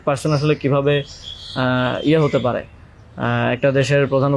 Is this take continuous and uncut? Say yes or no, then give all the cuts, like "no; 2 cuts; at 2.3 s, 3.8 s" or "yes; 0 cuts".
yes; 0 cuts